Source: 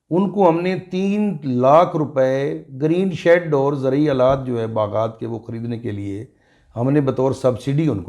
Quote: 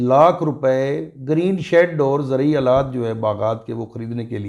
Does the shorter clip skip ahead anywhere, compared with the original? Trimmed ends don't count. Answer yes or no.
no